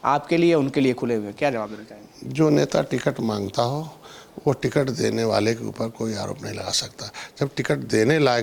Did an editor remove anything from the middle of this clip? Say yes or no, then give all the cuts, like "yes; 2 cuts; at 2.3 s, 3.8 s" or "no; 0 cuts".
no; 0 cuts